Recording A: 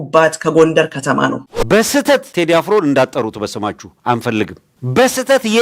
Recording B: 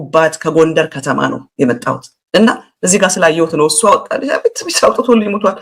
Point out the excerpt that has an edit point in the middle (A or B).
A